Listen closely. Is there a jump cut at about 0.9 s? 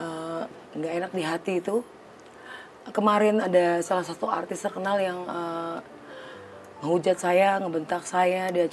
yes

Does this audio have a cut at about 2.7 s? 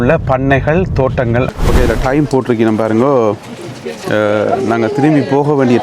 no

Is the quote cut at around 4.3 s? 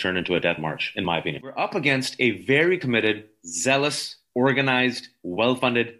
no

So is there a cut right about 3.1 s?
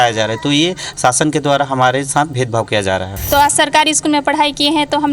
yes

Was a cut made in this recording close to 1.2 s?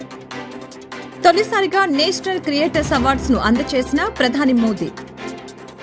yes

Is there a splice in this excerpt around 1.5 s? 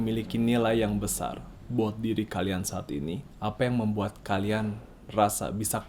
yes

